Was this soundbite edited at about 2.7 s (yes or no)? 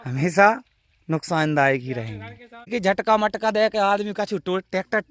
yes